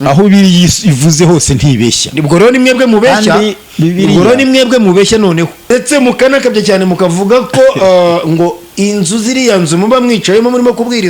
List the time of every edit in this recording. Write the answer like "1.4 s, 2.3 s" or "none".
5.6 s